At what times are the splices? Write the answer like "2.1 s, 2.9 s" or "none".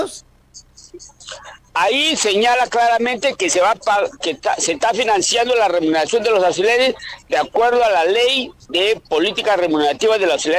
none